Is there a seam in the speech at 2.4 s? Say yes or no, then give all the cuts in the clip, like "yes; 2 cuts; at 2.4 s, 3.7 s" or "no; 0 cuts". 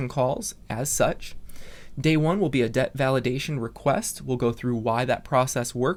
no; 0 cuts